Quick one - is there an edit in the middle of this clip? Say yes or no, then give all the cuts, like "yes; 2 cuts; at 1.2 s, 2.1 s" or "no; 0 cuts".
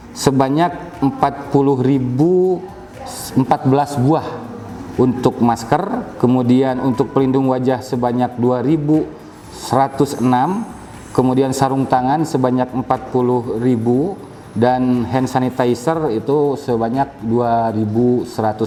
no; 0 cuts